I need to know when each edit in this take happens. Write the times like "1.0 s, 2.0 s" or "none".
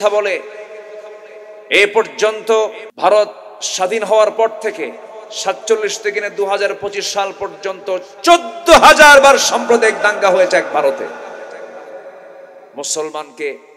2.8 s